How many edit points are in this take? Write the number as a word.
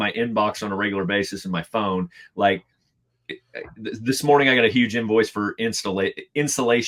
zero